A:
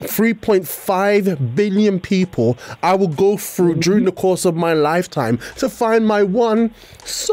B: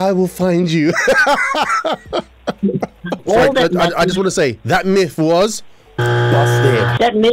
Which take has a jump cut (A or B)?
B